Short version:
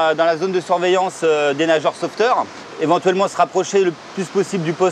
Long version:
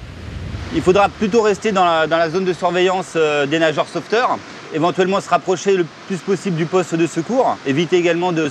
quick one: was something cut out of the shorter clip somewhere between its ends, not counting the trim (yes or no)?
no